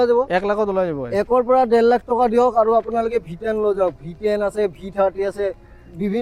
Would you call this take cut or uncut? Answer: uncut